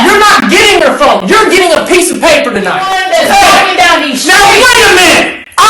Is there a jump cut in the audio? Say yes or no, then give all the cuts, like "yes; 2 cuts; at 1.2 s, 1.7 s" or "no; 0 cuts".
yes; 1 cut; at 2.9 s